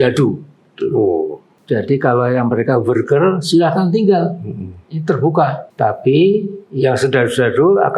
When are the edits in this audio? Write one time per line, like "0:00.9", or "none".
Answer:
0:01.5
0:05.6